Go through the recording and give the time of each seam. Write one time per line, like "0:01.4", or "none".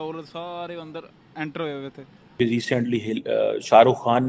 0:02.4